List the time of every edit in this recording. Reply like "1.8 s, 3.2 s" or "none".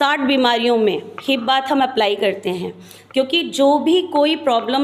none

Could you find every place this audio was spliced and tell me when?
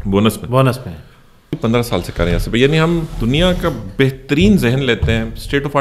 1.5 s

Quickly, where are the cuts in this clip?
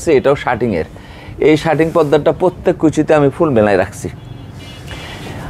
none

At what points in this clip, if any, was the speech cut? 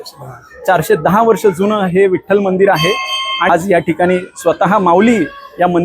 3.5 s

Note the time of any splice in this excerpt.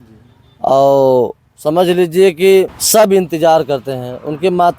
2.8 s

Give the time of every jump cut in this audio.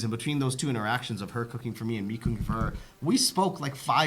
none

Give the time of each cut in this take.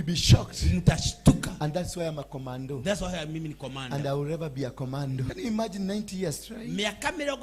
5.3 s

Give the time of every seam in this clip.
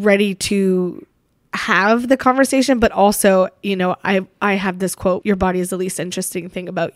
5.2 s

